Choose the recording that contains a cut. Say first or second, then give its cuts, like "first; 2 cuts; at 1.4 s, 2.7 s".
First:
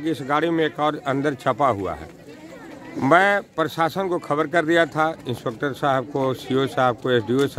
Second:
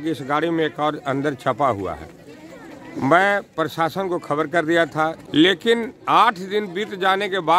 second; 1 cut; at 5.2 s